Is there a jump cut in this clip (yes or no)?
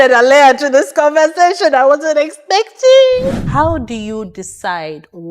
yes